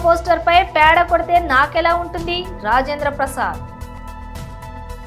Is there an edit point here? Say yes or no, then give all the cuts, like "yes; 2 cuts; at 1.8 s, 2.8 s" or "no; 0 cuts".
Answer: yes; 1 cut; at 4.0 s